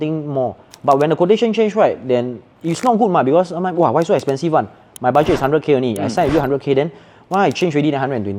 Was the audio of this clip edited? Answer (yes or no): no